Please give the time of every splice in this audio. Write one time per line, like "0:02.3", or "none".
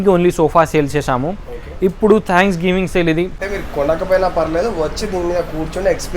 0:03.4